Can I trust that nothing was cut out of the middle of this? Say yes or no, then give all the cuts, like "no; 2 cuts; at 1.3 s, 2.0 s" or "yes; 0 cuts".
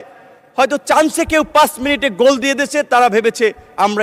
yes; 0 cuts